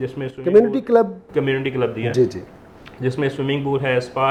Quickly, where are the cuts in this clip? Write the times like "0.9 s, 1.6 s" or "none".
none